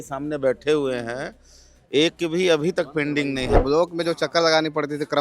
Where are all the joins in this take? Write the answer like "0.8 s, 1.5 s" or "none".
3.6 s